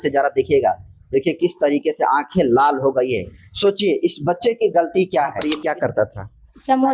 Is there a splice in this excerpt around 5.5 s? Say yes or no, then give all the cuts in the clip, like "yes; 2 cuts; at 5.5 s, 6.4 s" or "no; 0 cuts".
yes; 1 cut; at 5.5 s